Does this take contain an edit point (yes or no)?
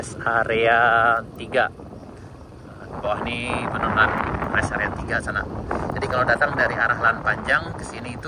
no